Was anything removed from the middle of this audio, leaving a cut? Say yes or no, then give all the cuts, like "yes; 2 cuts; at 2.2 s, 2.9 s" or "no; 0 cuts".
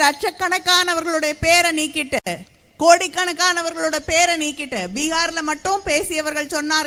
no; 0 cuts